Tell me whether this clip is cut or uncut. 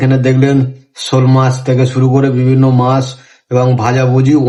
uncut